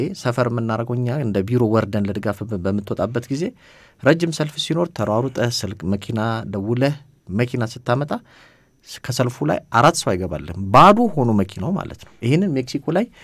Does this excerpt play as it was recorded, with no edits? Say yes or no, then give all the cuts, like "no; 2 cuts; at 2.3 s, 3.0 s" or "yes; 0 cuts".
yes; 0 cuts